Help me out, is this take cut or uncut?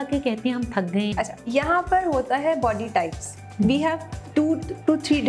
cut